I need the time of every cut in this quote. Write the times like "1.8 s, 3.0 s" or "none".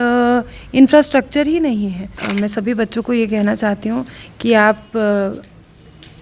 2.2 s